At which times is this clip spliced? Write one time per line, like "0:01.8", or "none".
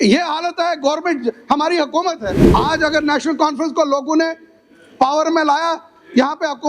0:02.3